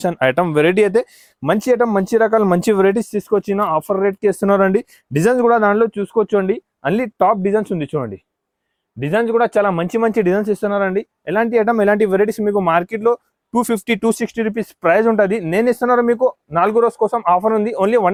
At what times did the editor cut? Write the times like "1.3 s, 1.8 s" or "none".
none